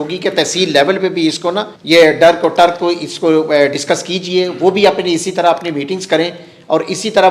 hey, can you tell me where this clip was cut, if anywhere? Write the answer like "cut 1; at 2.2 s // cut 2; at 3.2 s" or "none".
cut 1; at 1.7 s